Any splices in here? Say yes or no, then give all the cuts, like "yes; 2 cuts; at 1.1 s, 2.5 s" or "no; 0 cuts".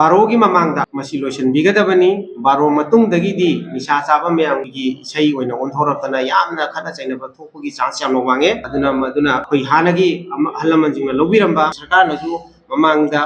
no; 0 cuts